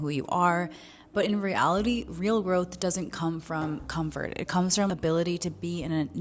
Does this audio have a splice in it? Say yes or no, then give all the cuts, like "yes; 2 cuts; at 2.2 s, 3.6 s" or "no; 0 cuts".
yes; 1 cut; at 4.9 s